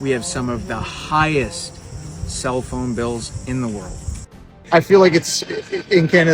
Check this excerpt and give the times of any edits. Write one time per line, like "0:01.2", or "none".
0:04.5

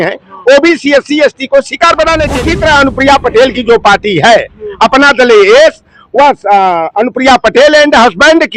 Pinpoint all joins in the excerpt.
0:02.4

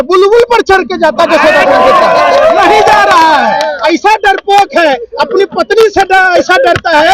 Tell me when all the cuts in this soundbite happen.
none

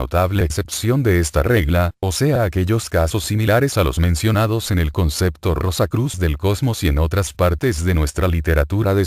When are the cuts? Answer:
0:06.7

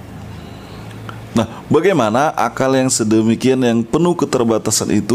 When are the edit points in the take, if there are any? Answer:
none

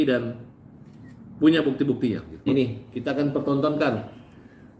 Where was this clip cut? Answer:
0:02.3

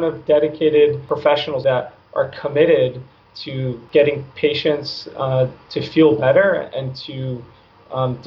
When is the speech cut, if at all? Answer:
0:01.6
0:03.8

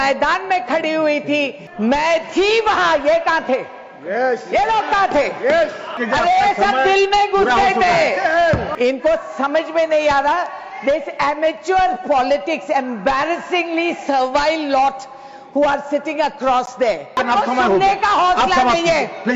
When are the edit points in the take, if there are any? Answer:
0:01.6
0:06.0
0:08.7
0:17.2

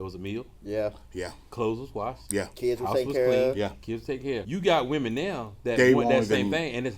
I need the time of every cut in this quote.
0:04.5

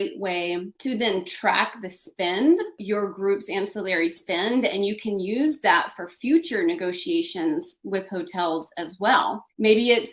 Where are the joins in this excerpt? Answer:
none

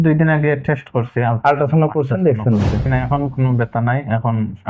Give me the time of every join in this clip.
0:02.8

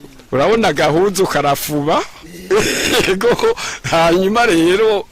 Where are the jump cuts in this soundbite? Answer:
none

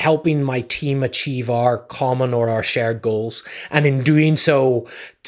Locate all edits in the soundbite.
none

